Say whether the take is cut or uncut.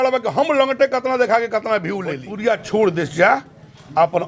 cut